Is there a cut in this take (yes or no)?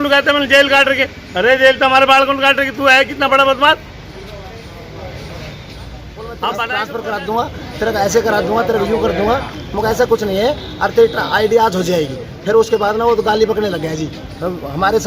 yes